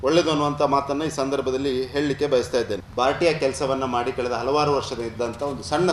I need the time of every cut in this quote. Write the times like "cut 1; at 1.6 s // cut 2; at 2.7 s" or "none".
cut 1; at 2.9 s